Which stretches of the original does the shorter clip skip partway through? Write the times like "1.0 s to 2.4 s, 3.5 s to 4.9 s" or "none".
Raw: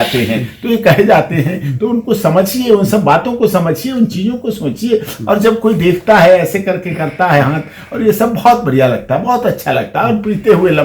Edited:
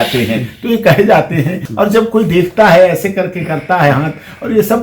1.6 s to 5.1 s